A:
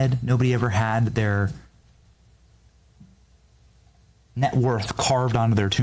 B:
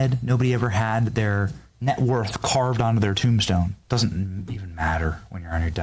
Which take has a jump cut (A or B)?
B